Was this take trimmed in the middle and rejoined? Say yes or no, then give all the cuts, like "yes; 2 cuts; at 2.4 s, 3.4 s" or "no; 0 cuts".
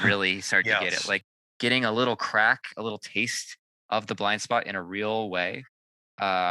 yes; 1 cut; at 1.2 s